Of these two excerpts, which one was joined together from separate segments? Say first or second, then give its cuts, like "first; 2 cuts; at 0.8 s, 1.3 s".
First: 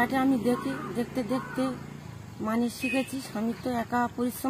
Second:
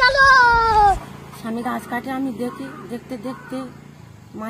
second; 1 cut; at 0.9 s